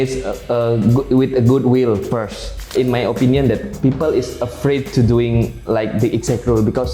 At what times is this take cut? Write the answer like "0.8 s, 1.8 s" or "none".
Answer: 2.7 s